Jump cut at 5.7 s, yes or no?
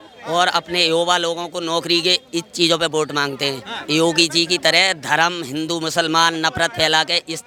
no